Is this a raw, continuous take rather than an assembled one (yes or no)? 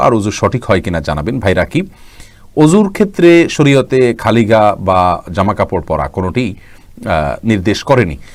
yes